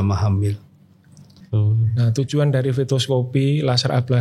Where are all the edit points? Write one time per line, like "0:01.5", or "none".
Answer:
0:01.3